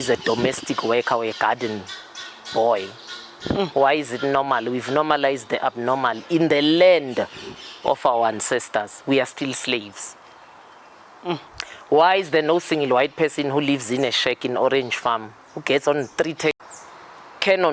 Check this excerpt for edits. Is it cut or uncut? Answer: cut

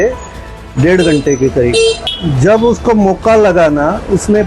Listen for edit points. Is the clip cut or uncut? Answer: cut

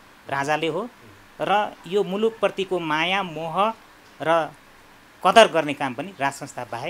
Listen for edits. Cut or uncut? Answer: uncut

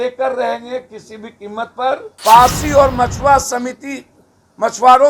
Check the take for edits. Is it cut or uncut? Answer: cut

